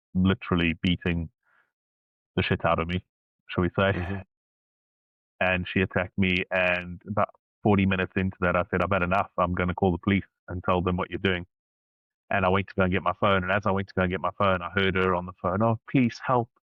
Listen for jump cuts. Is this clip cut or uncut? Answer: uncut